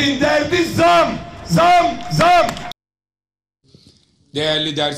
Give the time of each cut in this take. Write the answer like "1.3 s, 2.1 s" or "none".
3.9 s